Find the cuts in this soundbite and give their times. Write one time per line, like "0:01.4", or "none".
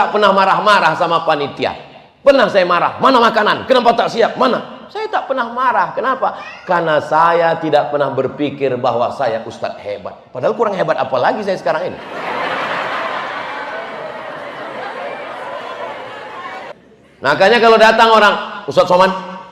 0:16.7